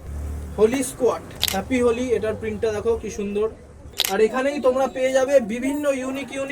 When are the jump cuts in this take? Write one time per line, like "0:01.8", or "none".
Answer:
0:03.9